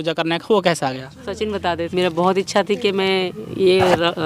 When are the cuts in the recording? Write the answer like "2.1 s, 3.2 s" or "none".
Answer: 1.9 s